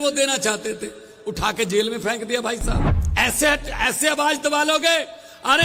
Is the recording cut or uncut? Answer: cut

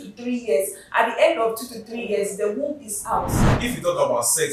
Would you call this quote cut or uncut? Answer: cut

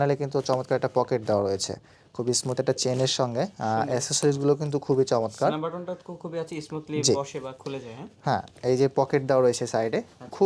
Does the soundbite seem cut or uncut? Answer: uncut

